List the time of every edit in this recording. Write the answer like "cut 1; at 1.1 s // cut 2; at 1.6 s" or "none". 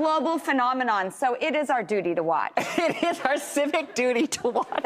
none